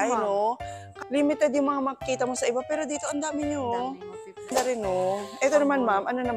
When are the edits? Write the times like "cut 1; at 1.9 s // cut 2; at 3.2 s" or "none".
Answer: cut 1; at 0.9 s // cut 2; at 4.5 s